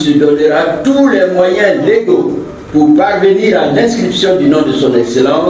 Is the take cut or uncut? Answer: uncut